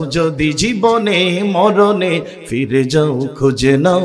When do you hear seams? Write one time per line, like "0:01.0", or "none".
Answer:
none